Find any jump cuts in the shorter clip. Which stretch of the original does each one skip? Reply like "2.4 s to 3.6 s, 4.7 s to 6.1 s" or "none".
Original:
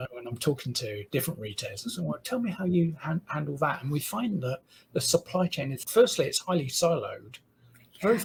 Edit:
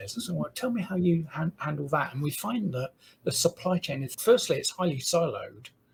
none